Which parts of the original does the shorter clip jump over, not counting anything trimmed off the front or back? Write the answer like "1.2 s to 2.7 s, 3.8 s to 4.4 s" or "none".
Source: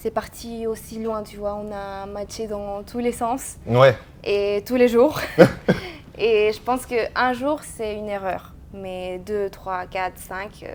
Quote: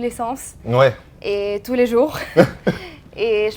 none

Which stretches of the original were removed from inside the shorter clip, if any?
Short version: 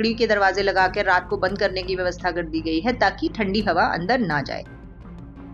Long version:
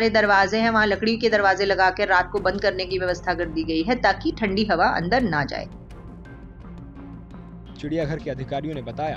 5.7 s to 6.2 s

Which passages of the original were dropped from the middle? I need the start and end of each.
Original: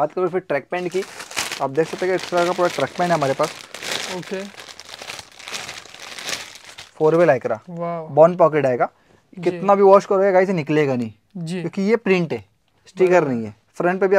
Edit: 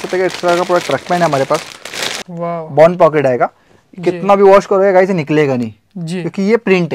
4.2 s to 7.7 s

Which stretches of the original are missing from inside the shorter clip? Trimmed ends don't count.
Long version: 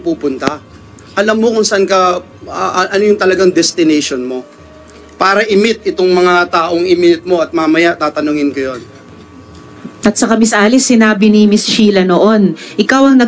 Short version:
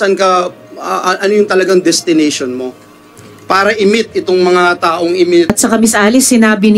7.2 s to 10.1 s

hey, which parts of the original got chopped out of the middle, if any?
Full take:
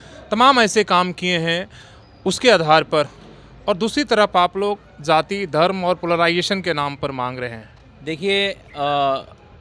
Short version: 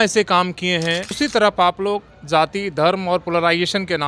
1.7 s to 3.9 s

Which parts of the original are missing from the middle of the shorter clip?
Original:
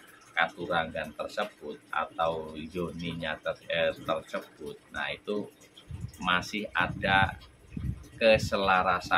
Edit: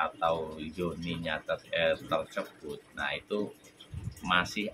none

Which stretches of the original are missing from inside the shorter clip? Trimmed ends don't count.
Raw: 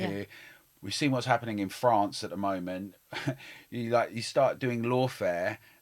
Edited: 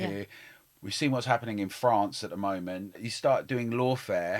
3.1 s to 4.2 s

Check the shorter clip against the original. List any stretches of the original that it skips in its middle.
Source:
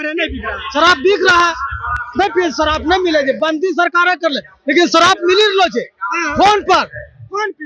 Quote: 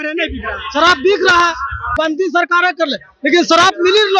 1.9 s to 3.4 s

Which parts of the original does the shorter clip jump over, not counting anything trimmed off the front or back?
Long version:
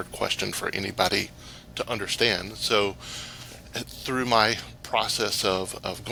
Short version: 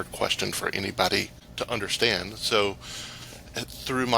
1.4 s to 1.6 s

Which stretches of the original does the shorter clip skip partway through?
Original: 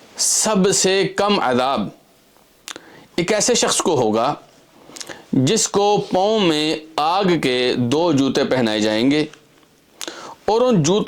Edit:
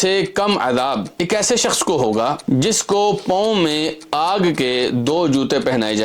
1.9 s to 3.1 s, 4.4 s to 5.2 s

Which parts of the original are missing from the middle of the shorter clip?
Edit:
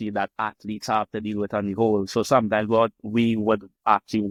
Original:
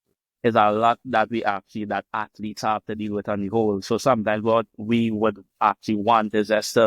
none

